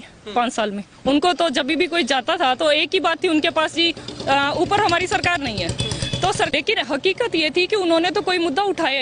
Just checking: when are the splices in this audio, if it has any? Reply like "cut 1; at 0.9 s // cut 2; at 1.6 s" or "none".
cut 1; at 6.5 s